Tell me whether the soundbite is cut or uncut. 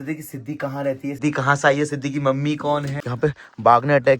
cut